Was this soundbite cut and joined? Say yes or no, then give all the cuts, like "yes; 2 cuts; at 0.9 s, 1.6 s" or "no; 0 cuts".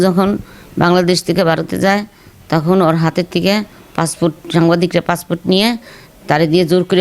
no; 0 cuts